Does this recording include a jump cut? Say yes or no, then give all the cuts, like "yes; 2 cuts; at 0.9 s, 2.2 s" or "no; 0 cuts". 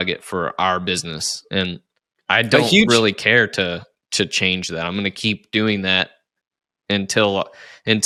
no; 0 cuts